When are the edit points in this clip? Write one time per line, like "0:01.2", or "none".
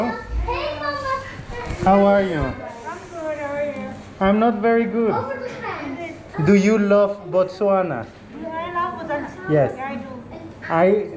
0:06.2